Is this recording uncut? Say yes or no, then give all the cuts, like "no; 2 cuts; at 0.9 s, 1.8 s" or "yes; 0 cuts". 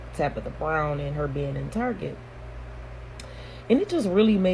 yes; 0 cuts